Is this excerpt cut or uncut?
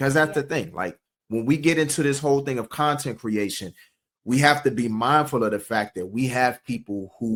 uncut